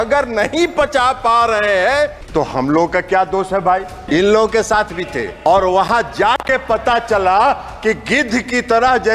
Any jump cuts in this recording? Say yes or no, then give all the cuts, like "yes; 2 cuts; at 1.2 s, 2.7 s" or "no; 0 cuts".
yes; 3 cuts; at 2.2 s, 3.9 s, 5.3 s